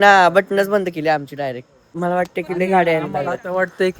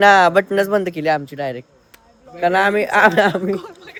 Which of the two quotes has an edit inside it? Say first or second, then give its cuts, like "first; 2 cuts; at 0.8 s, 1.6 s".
first; 1 cut; at 1.9 s